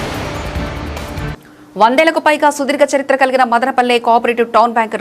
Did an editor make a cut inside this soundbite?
yes; 1 cut; at 1.3 s

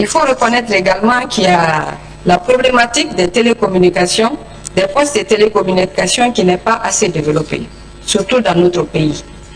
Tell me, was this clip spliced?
no; 0 cuts

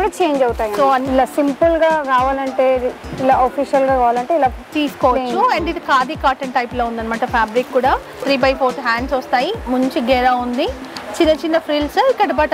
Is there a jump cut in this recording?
yes; 2 cuts; at 1.1 s, 8.2 s

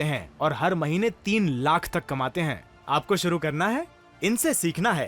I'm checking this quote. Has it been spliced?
no; 0 cuts

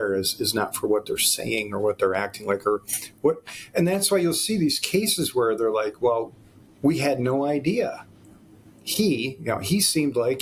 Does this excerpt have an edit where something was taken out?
no; 0 cuts

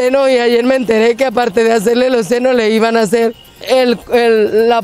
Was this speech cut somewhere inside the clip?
yes; 1 cut; at 3.5 s

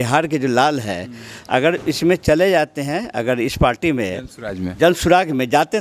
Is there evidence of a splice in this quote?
no; 0 cuts

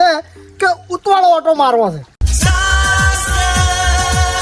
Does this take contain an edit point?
yes; 1 cut; at 2.3 s

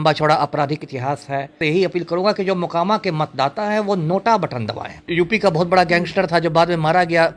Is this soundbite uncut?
no; 2 cuts; at 1.5 s, 5.1 s

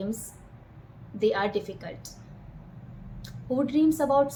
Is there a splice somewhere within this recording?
no; 0 cuts

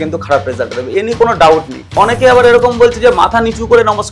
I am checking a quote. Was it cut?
yes; 1 cut; at 1.9 s

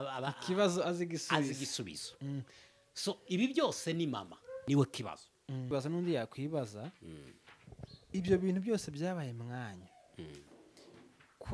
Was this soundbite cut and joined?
yes; 2 cuts; at 4.5 s, 5.7 s

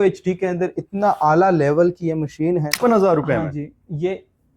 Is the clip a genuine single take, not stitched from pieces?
no; 1 cut; at 2.7 s

